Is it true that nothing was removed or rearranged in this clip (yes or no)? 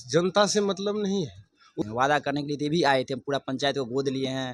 no